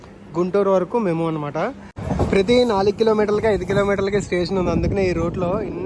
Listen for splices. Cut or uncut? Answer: cut